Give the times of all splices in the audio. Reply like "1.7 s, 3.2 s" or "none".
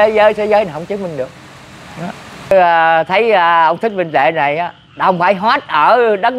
2.5 s